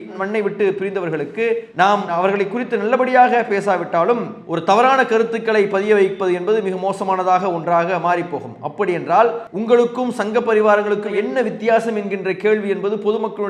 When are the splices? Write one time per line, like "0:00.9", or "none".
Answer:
0:09.5